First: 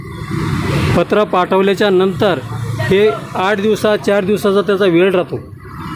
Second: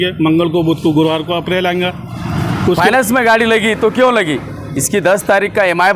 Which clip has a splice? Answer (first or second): second